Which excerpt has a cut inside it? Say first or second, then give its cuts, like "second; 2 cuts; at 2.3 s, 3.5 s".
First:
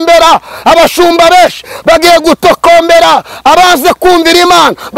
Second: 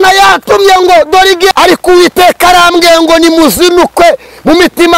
second; 1 cut; at 1.5 s